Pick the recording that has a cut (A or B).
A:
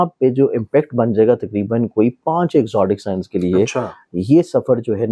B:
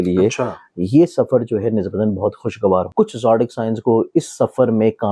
B